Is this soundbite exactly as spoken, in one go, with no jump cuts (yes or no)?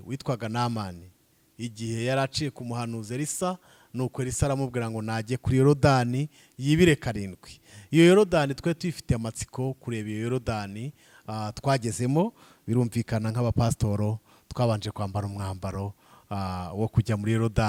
yes